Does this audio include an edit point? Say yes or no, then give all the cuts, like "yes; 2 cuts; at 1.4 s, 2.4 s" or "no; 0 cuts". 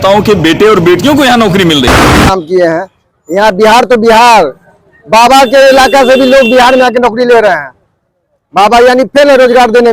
yes; 1 cut; at 2.3 s